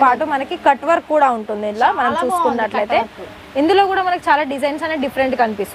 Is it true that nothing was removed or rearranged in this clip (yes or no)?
yes